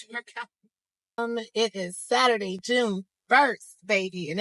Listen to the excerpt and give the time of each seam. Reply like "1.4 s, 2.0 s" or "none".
1.2 s